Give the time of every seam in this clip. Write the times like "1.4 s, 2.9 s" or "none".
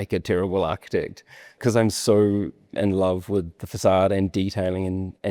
1.6 s